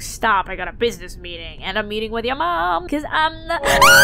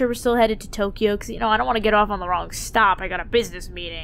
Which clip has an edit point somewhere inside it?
first; 1 cut; at 2.8 s

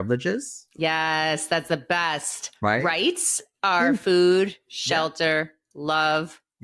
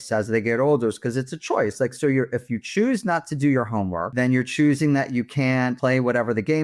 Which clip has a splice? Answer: second; 2 cuts; at 4.1 s, 5.8 s

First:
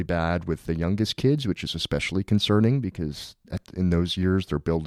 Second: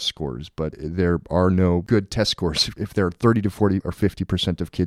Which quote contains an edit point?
second; 4 cuts; at 0.8 s, 1.8 s, 2.7 s, 3.9 s

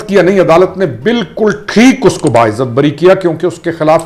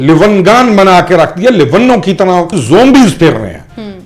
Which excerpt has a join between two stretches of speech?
second; 1 cut; at 2.6 s

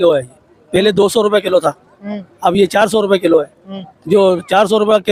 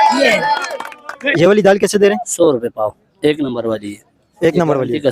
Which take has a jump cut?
second; 1 cut; at 1.3 s

